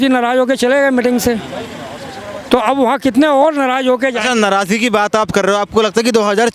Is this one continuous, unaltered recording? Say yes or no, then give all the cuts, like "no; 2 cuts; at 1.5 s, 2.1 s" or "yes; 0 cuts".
yes; 0 cuts